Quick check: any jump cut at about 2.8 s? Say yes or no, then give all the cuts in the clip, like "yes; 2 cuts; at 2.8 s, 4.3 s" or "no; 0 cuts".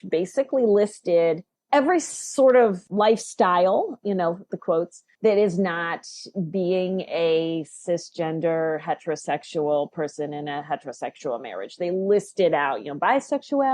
yes; 3 cuts; at 1.5 s, 2.8 s, 5.0 s